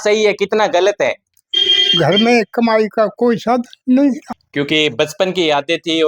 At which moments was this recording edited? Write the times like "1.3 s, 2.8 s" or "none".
1.3 s, 4.3 s